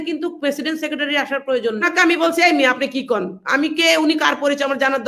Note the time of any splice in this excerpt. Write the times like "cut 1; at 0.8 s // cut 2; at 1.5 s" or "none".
cut 1; at 1.8 s

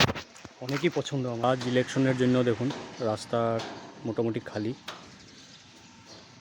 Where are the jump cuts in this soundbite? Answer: cut 1; at 1.4 s

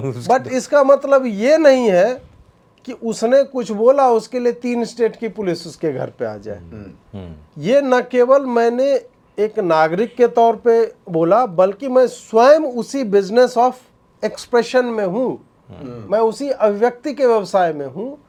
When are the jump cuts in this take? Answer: none

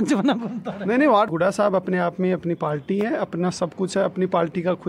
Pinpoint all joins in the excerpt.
cut 1; at 1.3 s

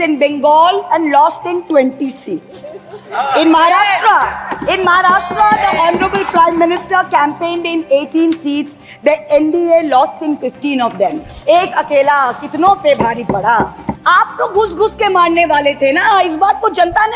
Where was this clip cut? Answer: cut 1; at 13.9 s

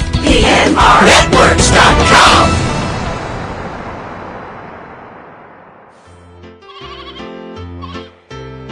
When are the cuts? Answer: cut 1; at 6.2 s

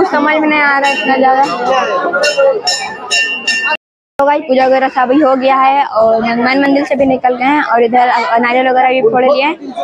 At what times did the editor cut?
none

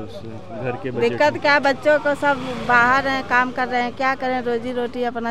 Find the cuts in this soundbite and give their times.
none

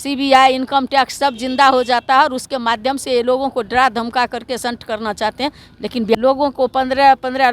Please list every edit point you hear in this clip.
cut 1; at 6.2 s

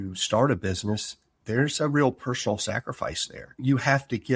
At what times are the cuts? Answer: cut 1; at 3.4 s

